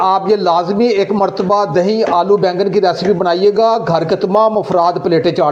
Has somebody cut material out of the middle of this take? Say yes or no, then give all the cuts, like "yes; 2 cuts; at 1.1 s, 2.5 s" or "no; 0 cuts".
no; 0 cuts